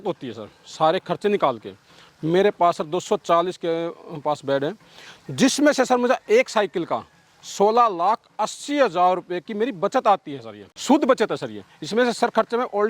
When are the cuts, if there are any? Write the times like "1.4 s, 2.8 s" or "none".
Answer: 10.7 s